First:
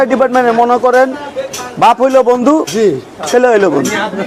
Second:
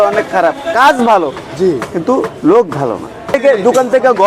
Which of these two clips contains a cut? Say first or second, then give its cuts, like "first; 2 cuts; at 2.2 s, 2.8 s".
second; 1 cut; at 3.4 s